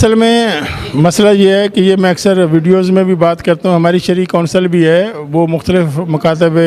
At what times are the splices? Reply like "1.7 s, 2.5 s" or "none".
none